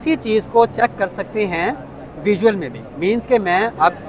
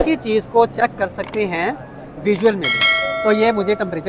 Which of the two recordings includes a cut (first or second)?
second